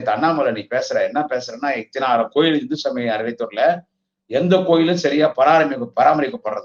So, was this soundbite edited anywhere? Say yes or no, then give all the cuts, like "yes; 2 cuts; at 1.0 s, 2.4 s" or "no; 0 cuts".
no; 0 cuts